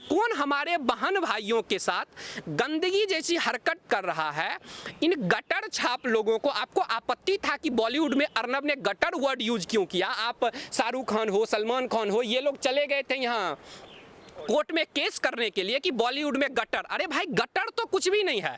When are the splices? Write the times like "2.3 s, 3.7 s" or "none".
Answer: none